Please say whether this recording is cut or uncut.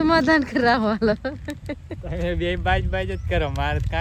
uncut